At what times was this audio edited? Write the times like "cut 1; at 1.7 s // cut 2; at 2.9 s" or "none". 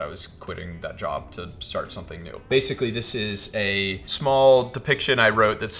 cut 1; at 2.5 s // cut 2; at 4.1 s

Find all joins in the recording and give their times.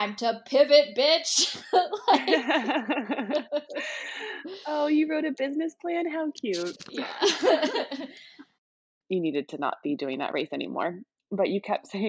cut 1; at 8.9 s

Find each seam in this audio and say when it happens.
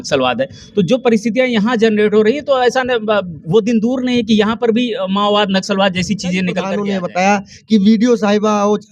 cut 1; at 6.6 s

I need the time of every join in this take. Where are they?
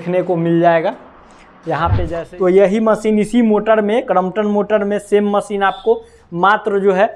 cut 1; at 2.1 s

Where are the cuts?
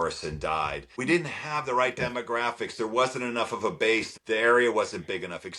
cut 1; at 1.0 s // cut 2; at 4.1 s

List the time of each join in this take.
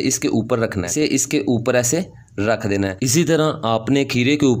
cut 1; at 0.9 s // cut 2; at 3.1 s

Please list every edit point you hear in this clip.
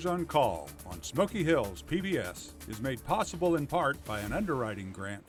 none

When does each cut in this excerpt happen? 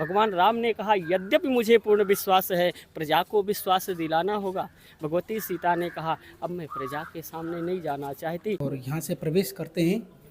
cut 1; at 8.6 s

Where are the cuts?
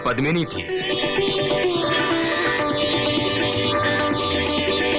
none

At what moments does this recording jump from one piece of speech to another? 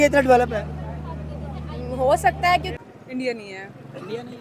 cut 1; at 2.7 s

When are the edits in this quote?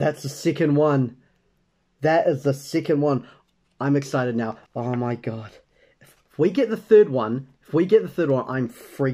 cut 1; at 4.6 s

